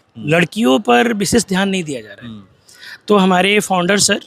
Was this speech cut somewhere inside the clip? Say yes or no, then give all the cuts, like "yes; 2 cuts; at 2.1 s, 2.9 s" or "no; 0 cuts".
no; 0 cuts